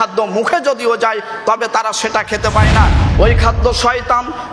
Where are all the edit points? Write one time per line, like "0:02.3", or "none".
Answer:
0:03.0